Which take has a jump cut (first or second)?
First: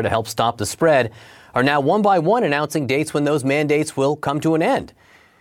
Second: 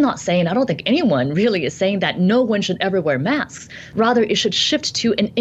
second